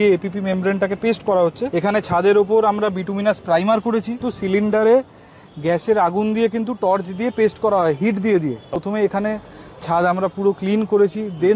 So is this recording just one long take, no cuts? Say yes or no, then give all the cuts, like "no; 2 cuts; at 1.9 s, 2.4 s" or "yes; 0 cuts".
no; 3 cuts; at 1.6 s, 4.3 s, 8.8 s